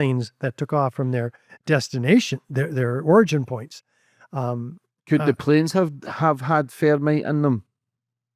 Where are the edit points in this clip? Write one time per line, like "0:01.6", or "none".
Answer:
none